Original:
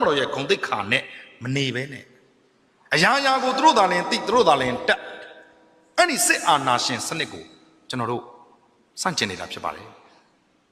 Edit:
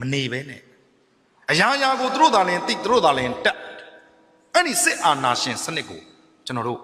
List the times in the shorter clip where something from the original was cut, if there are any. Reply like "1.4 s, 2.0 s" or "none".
none

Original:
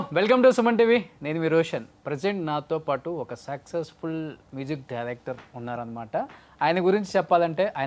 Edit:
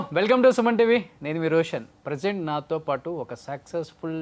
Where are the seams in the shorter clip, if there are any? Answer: none

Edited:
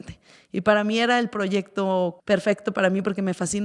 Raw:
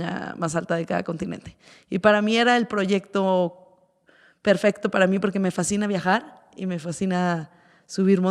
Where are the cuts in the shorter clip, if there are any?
2.2 s

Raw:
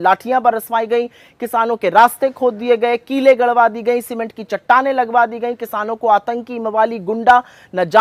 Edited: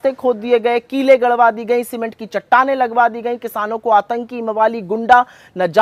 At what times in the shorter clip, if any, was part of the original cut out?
none

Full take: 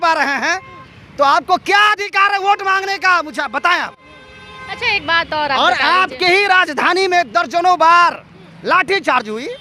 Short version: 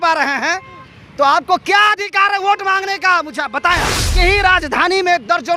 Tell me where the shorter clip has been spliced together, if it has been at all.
4.1 s

